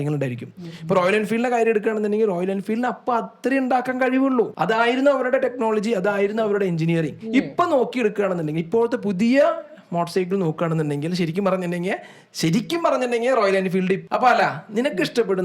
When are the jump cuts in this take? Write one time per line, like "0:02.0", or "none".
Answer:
0:14.0